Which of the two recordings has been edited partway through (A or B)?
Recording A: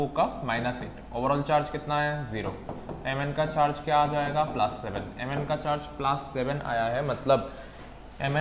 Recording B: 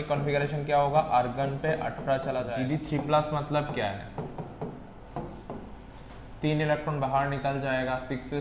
B